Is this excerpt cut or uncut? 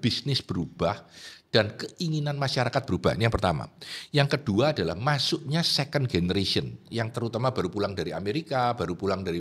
uncut